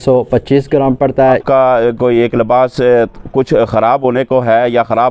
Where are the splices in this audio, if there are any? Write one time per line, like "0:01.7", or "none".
0:01.4